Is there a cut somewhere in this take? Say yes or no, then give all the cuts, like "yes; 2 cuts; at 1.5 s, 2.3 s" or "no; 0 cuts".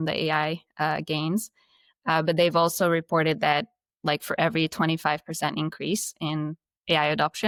no; 0 cuts